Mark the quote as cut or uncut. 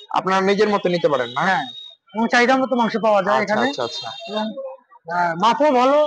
uncut